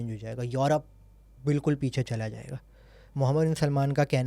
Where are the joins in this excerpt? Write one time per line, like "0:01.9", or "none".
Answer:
none